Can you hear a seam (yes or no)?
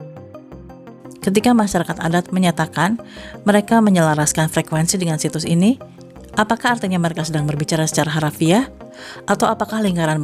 yes